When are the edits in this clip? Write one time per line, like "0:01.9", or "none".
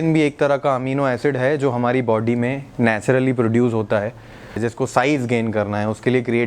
0:04.5